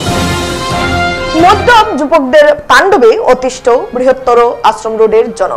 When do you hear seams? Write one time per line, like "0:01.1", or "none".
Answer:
0:01.0